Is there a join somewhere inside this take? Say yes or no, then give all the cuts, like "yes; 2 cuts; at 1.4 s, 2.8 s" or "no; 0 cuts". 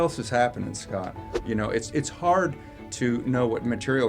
yes; 1 cut; at 1.3 s